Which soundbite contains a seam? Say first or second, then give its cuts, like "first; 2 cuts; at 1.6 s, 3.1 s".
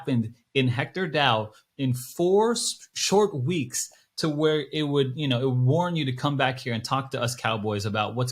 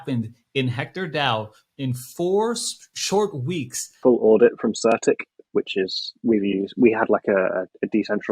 second; 1 cut; at 4.0 s